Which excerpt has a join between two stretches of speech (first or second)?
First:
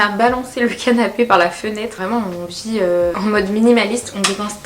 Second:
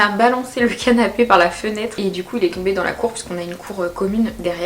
first